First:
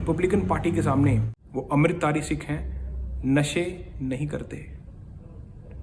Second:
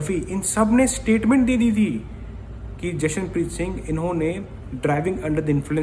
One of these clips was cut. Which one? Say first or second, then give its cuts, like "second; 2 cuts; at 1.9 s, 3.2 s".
first; 1 cut; at 1.4 s